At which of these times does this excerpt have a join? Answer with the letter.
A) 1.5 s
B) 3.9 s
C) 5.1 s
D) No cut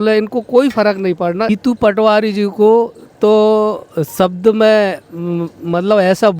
A